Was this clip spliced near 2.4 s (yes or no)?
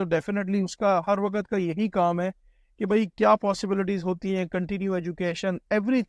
no